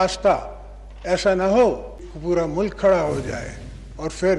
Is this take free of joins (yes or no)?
no